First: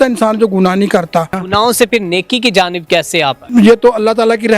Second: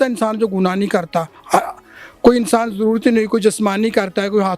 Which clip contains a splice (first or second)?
first